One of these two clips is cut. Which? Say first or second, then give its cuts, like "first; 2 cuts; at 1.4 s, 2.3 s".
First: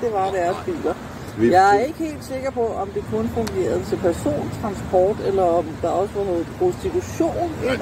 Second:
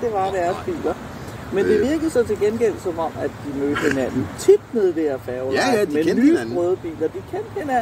first; 1 cut; at 1.2 s